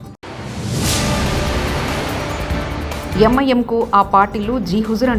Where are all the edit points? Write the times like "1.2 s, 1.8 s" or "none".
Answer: 3.1 s